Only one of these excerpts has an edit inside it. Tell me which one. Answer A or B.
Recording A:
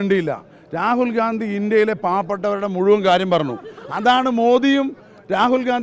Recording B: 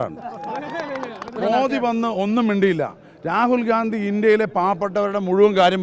B